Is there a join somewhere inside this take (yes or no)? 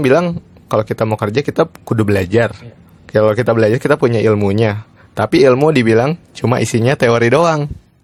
no